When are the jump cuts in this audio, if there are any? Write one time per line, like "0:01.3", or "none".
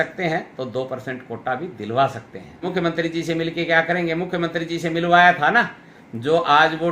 0:02.6